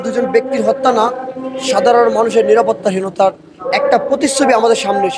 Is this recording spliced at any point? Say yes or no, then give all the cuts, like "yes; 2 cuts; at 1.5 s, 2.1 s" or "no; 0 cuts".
no; 0 cuts